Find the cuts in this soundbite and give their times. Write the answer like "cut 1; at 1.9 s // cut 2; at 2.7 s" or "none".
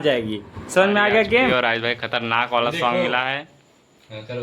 cut 1; at 1.5 s